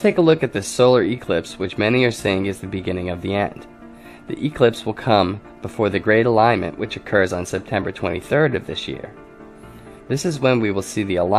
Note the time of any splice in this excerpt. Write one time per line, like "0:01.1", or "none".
0:06.3